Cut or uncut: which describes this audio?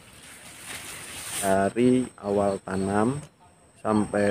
cut